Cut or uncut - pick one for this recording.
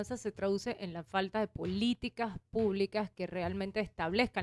uncut